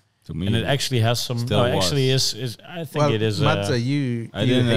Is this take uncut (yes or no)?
yes